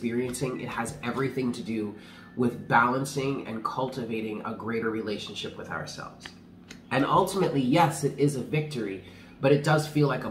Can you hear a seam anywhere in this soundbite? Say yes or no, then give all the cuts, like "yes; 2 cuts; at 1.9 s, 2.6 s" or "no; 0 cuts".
no; 0 cuts